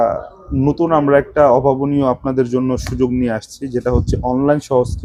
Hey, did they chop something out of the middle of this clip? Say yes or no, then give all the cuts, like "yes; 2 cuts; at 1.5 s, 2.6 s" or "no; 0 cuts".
no; 0 cuts